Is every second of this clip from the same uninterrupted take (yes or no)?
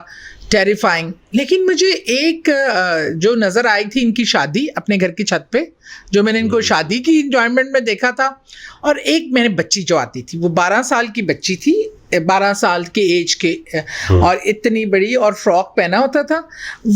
yes